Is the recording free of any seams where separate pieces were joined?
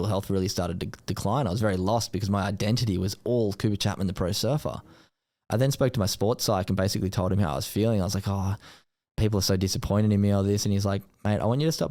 yes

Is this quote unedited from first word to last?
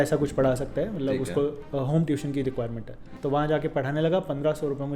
no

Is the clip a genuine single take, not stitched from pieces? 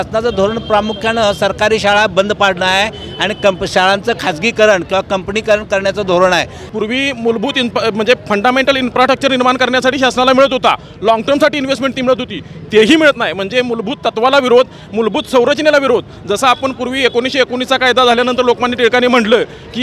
no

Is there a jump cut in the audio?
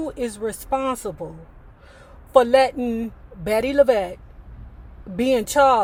no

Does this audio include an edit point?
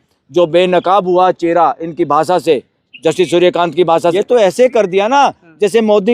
yes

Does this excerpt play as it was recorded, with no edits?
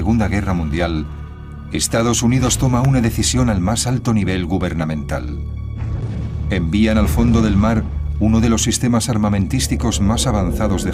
yes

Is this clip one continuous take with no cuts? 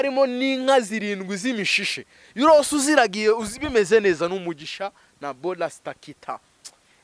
yes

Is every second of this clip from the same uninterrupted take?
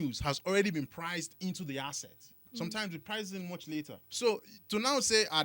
no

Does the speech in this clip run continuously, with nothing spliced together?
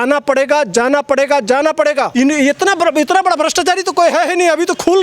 no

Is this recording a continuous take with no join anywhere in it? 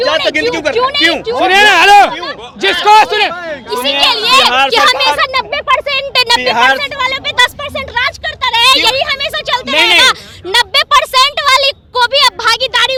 yes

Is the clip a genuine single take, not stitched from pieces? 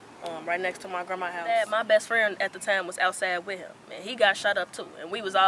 no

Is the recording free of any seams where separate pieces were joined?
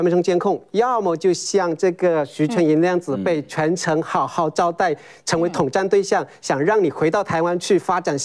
yes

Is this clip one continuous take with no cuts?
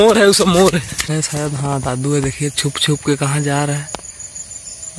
no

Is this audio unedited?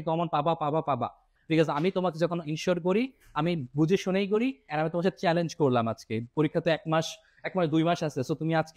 no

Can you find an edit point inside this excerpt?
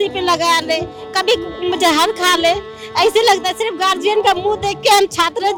no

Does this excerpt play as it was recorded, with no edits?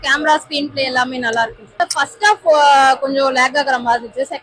no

